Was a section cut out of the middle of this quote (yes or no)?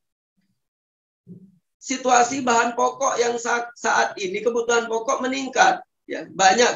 no